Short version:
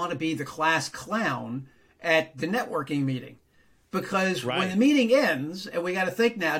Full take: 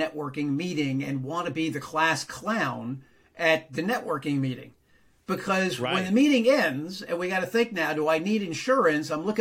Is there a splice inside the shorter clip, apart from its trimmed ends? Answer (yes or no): no